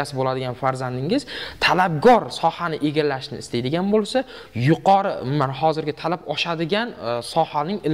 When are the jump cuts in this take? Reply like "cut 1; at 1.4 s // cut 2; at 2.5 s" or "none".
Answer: none